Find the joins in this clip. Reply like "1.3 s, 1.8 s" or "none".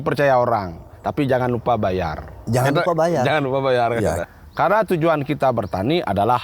4.2 s